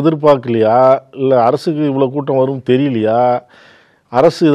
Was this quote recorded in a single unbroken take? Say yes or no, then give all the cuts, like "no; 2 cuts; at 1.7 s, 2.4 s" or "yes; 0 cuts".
yes; 0 cuts